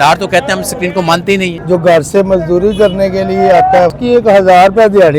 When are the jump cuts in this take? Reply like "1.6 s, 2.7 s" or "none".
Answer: 1.5 s, 3.9 s